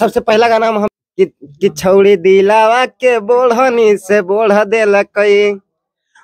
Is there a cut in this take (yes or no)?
yes